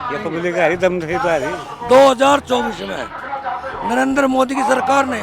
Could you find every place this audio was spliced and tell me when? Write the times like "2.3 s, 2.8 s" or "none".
1.7 s